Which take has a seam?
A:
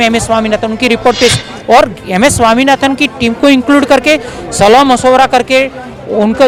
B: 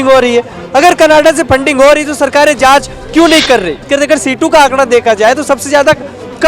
B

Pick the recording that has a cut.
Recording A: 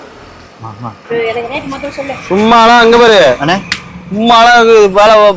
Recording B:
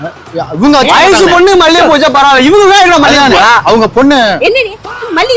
A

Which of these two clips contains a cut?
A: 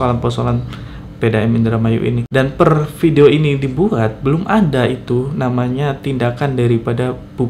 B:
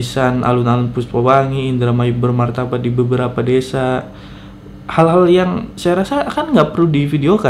A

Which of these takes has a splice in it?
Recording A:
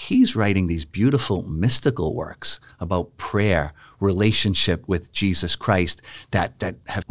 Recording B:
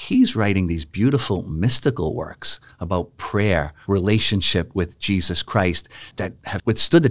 B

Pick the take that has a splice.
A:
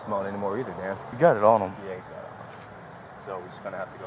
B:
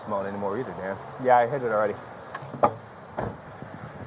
A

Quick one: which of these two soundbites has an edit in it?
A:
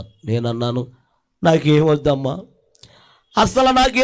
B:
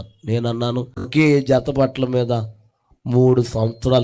B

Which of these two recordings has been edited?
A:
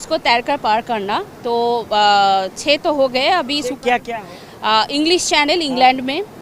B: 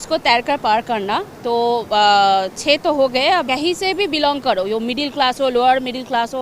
B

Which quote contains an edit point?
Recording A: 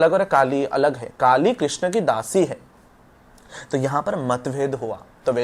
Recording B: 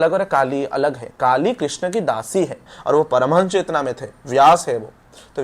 B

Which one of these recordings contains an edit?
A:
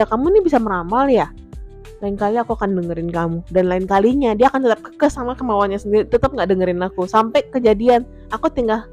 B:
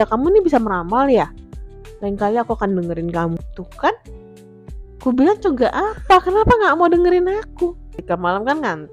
B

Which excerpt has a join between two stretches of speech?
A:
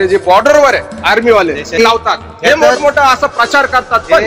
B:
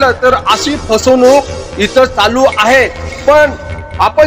A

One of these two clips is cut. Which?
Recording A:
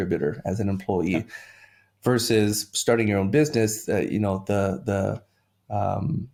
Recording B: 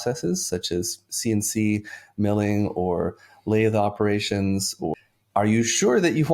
B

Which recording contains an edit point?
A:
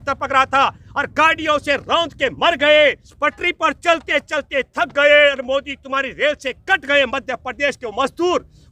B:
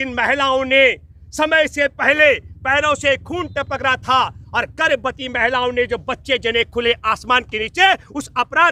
A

